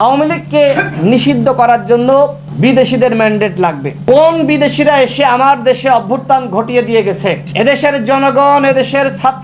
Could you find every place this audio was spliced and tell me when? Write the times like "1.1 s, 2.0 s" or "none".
none

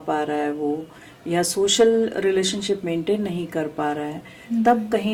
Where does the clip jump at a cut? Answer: none

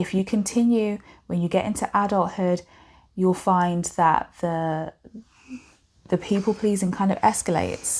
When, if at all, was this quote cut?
none

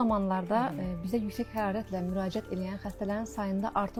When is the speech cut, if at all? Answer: none

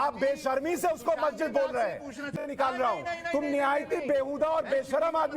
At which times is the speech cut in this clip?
2.4 s

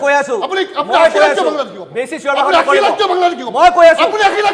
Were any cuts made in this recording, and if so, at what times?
none

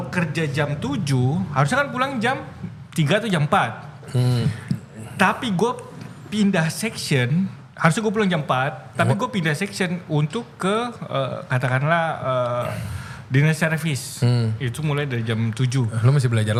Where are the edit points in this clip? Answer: none

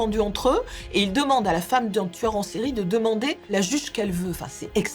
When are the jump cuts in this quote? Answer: 3.5 s

